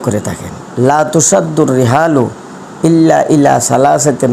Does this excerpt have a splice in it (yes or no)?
no